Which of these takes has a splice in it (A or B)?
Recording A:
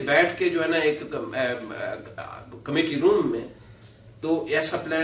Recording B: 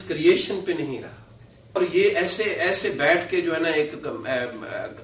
B